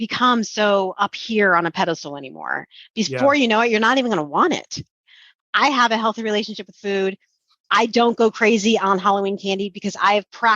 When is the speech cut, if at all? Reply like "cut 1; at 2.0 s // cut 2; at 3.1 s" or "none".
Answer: cut 1; at 5.2 s